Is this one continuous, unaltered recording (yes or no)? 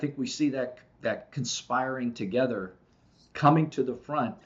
yes